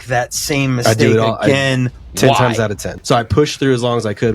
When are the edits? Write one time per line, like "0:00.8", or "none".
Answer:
0:02.9